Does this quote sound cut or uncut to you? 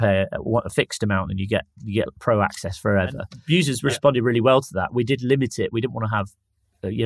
cut